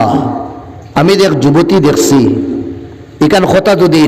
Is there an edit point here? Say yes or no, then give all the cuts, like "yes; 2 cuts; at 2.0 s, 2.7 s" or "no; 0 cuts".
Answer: no; 0 cuts